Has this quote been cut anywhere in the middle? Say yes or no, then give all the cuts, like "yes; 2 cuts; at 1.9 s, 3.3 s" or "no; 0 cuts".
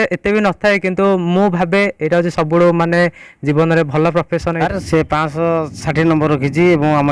yes; 1 cut; at 4.6 s